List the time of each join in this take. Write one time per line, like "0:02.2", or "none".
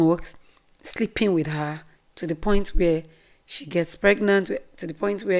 none